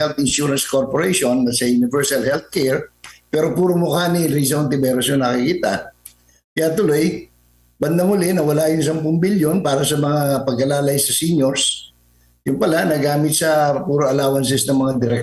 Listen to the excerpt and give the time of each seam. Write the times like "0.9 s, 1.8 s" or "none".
none